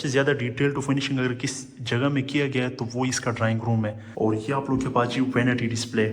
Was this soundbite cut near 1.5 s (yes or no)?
no